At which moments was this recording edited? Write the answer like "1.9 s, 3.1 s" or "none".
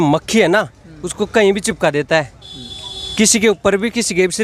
none

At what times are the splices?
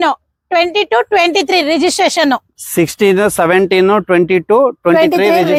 none

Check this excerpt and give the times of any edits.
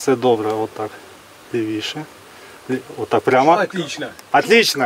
none

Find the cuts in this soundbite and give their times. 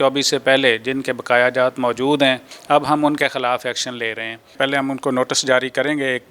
2.5 s, 4.5 s

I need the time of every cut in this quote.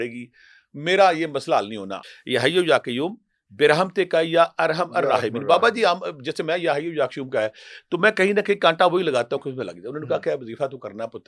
2.0 s

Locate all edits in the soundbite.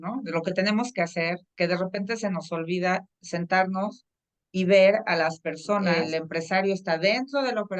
5.9 s

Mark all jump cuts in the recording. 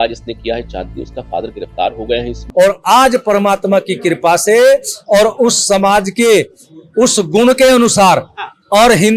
2.4 s

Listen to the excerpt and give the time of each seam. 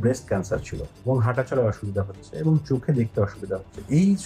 0.9 s

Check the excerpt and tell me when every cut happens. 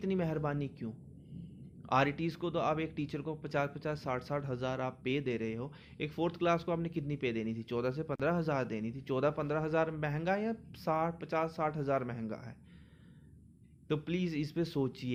none

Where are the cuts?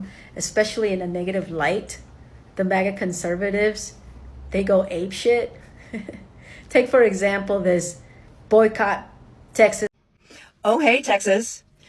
10.0 s

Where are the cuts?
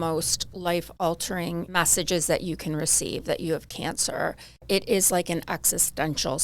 1.7 s, 4.6 s

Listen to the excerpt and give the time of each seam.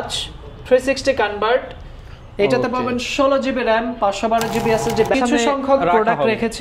5.1 s

